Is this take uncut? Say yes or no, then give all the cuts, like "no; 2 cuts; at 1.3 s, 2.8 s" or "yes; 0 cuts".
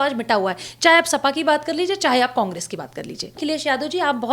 no; 1 cut; at 3.4 s